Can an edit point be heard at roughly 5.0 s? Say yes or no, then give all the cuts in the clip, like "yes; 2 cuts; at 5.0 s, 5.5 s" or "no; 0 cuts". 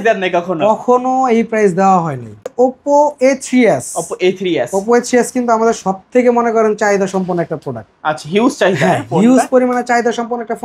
no; 1 cut; at 2.4 s